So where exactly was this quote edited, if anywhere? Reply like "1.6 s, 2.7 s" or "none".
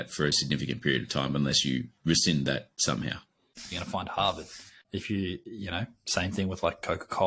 3.7 s, 4.8 s